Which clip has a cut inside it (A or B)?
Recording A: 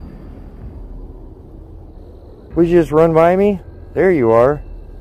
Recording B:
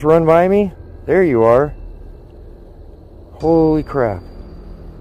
A